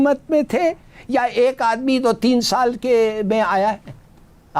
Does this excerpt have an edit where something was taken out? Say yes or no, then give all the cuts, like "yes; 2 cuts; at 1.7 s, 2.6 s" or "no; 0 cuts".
no; 0 cuts